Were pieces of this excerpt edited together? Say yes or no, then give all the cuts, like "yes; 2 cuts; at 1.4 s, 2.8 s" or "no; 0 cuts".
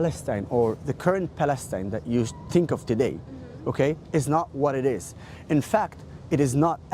no; 0 cuts